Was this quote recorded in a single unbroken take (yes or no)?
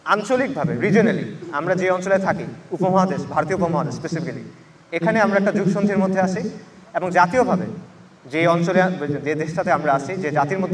yes